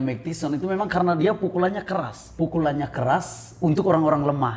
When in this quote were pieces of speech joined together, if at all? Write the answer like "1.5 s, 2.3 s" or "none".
2.2 s